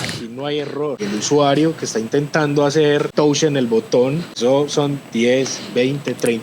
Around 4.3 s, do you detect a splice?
yes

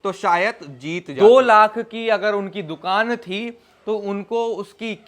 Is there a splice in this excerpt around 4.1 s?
no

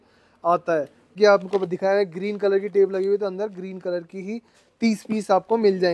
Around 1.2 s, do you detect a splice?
yes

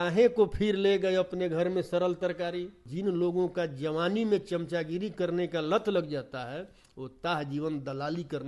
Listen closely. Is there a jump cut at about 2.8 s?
yes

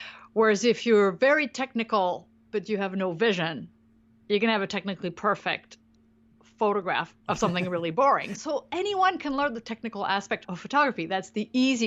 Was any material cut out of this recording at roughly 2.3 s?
no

